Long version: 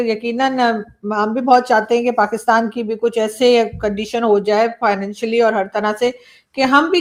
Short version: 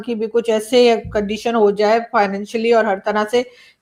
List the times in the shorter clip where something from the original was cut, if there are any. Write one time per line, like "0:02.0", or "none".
none